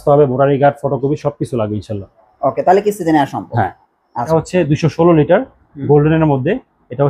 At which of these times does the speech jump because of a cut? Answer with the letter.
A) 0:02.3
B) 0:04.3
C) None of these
B